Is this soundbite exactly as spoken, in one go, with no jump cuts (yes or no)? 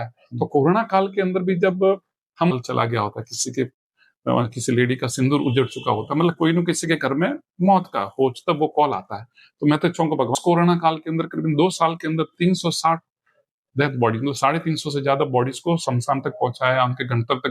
no